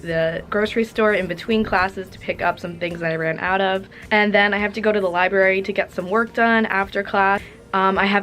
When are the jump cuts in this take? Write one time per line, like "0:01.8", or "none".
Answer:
0:03.9